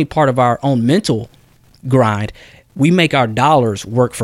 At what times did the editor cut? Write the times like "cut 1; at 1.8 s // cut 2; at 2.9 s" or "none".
none